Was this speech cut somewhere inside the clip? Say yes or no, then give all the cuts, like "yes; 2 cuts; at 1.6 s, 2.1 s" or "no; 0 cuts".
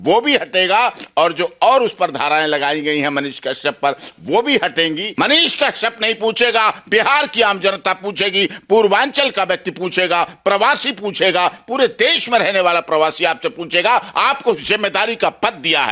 yes; 1 cut; at 5.1 s